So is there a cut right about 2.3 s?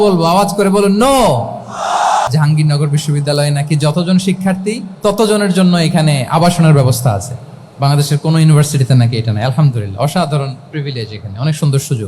yes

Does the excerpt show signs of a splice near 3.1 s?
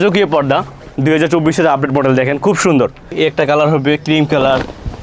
yes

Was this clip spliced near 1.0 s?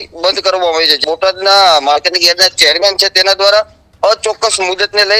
yes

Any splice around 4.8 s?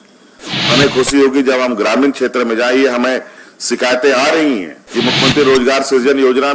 yes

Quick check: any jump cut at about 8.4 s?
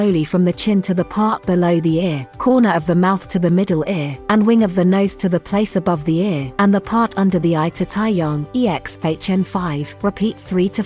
yes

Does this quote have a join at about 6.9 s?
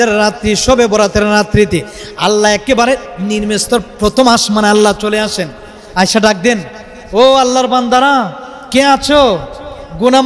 no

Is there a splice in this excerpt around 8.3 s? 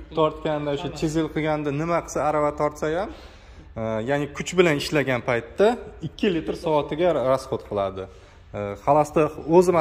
no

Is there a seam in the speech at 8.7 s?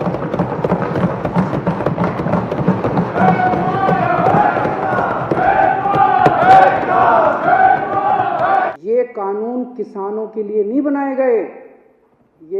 yes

